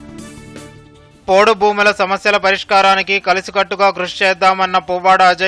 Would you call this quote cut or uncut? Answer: uncut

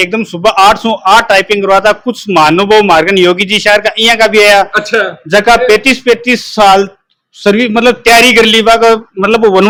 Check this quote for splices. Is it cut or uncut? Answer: uncut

